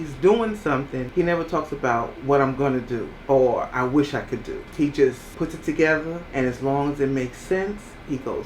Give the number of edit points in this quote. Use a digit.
5